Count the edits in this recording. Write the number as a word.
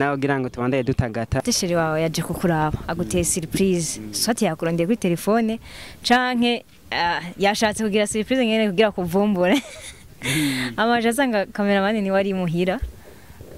one